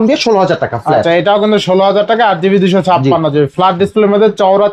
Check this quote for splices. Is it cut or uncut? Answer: uncut